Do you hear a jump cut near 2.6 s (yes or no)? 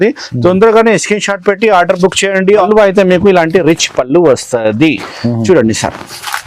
yes